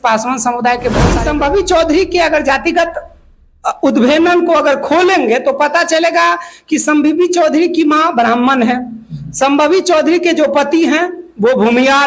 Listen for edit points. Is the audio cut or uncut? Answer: cut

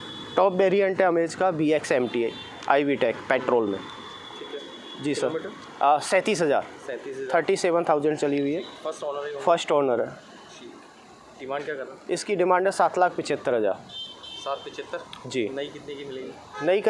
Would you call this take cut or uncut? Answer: uncut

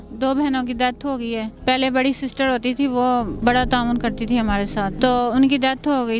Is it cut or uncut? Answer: cut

